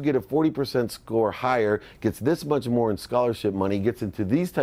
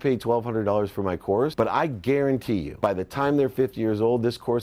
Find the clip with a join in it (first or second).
second